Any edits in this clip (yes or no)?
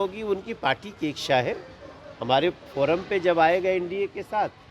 no